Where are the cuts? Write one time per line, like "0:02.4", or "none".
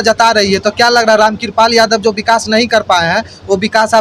none